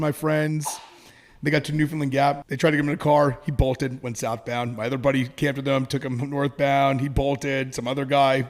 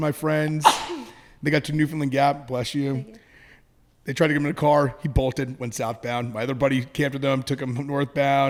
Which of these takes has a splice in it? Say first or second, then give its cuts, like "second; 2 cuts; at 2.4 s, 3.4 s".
first; 1 cut; at 2.4 s